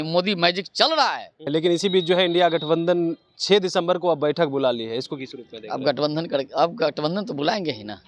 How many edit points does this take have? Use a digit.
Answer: 1